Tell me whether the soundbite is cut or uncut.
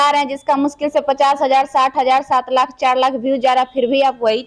uncut